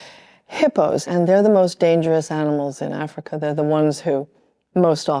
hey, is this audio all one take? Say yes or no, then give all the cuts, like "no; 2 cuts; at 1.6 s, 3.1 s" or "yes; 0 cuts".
no; 1 cut; at 1.0 s